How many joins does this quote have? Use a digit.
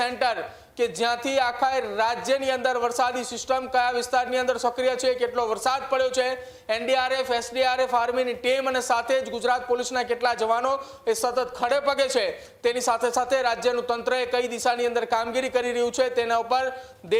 0